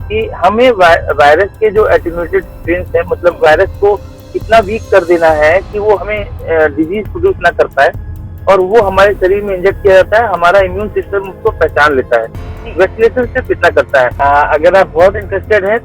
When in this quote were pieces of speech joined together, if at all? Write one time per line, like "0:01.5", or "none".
0:14.1